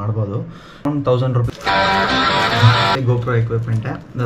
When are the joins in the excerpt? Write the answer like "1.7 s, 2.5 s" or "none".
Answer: 1.5 s